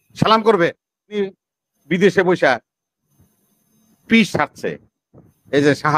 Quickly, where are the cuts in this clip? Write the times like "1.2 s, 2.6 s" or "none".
1.2 s